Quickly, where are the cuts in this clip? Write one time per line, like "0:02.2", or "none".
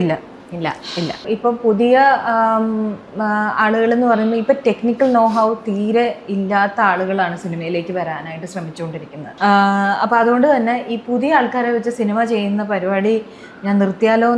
0:01.2
0:09.3